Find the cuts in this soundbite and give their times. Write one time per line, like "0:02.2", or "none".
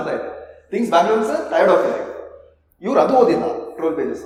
none